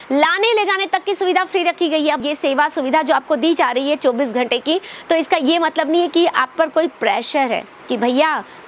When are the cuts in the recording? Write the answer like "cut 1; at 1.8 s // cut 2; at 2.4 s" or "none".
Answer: cut 1; at 2.2 s